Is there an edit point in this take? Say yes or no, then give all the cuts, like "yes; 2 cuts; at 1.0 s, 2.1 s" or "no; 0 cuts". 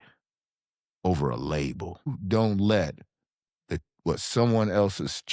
yes; 1 cut; at 2.2 s